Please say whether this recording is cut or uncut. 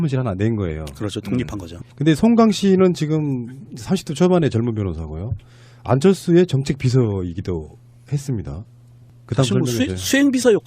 uncut